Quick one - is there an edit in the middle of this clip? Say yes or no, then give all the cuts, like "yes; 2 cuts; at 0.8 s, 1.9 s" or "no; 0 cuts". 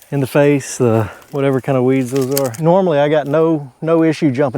yes; 2 cuts; at 1.1 s, 2.5 s